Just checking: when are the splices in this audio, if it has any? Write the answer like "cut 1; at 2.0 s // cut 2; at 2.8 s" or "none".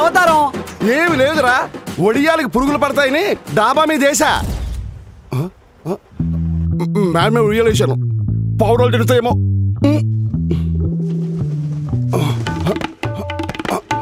none